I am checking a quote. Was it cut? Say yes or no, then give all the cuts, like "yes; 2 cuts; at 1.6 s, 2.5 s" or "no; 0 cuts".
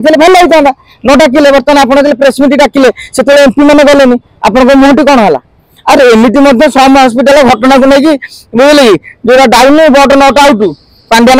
no; 0 cuts